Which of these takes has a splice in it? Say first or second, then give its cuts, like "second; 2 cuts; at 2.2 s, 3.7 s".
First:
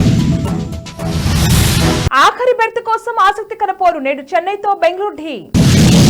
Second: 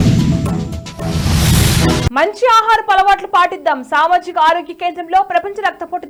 first; 1 cut; at 1.9 s